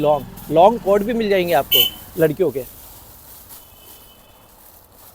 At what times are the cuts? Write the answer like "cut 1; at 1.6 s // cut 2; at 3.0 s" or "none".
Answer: none